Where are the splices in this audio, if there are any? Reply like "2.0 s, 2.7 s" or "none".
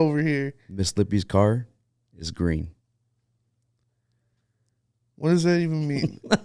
none